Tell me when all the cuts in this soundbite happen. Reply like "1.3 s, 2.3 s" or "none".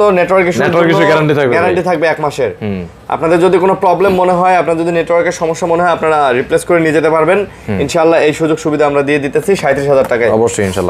none